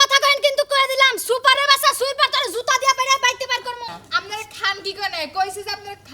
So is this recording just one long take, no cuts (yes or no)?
no